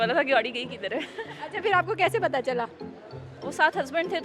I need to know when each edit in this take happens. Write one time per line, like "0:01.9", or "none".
none